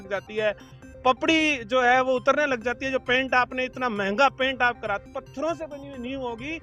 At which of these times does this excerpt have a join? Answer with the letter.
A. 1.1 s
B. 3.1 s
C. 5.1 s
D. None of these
C